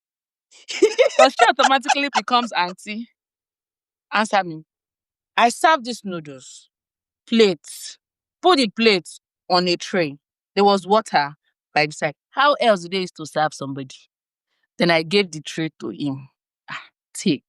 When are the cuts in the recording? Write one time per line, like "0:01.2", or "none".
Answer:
0:04.8